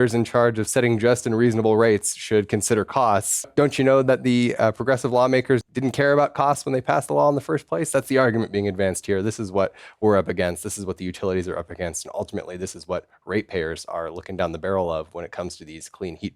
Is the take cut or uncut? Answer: cut